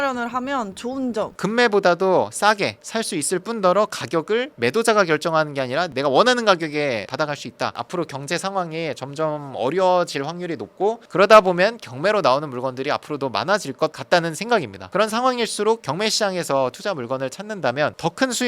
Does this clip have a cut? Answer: yes; 4 cuts; at 1.3 s, 5.9 s, 7.7 s, 15.8 s

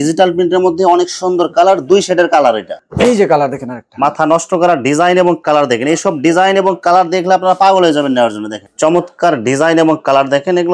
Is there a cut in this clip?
yes; 2 cuts; at 2.8 s, 8.7 s

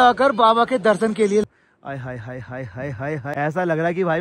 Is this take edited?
yes; 2 cuts; at 1.4 s, 3.3 s

